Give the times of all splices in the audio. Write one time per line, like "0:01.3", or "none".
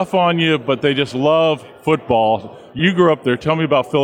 0:02.8

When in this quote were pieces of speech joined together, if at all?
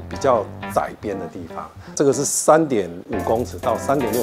0:02.0
0:03.0

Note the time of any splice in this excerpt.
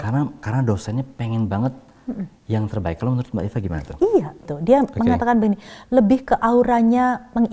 0:04.5

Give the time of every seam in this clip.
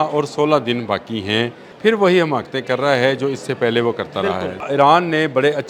0:01.6
0:04.6

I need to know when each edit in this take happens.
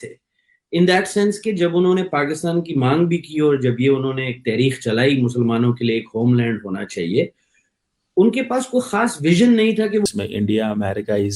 0:10.1

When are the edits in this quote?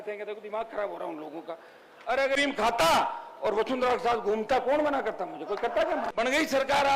0:02.4
0:06.1

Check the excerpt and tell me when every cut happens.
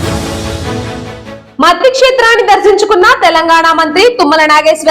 0:01.0

